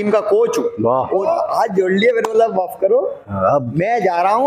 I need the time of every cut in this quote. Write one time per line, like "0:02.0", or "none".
0:01.2